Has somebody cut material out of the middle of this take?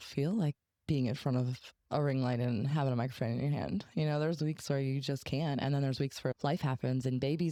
no; 0 cuts

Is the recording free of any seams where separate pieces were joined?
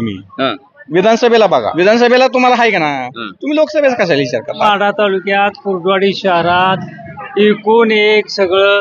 no; 2 cuts; at 1.7 s, 4.6 s

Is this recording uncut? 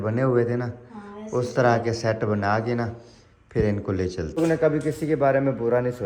no; 1 cut; at 4.4 s

